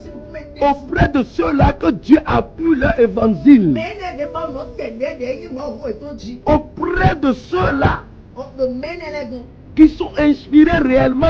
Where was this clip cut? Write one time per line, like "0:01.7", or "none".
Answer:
0:06.3